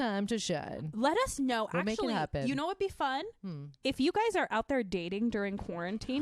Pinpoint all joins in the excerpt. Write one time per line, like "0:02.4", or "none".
none